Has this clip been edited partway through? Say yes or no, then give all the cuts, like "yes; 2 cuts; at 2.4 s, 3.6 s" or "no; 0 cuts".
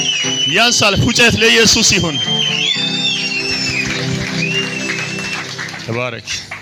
no; 0 cuts